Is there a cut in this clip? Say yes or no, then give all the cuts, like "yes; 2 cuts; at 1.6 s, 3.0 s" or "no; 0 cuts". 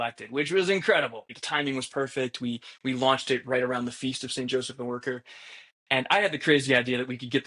yes; 1 cut; at 1.2 s